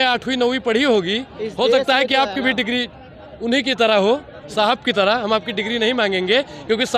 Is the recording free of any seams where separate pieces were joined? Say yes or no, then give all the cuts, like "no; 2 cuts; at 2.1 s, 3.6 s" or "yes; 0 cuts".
yes; 0 cuts